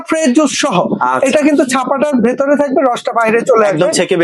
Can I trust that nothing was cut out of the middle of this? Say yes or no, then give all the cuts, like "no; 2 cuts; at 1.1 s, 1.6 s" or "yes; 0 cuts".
yes; 0 cuts